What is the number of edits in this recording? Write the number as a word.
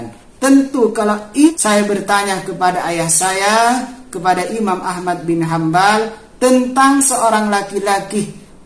one